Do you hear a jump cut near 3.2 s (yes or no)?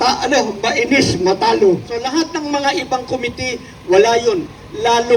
no